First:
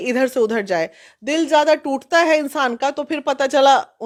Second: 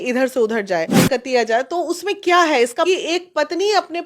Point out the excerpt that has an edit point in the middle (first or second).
second